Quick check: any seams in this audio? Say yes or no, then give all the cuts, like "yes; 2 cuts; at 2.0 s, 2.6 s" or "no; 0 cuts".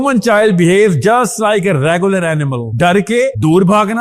no; 0 cuts